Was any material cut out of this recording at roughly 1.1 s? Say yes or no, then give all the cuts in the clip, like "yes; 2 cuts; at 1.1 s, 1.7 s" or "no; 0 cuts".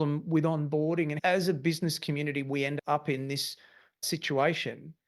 yes; 3 cuts; at 1.1 s, 2.7 s, 4.0 s